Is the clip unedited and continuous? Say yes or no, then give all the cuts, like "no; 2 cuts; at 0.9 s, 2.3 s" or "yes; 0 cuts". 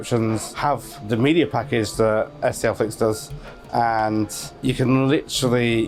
yes; 0 cuts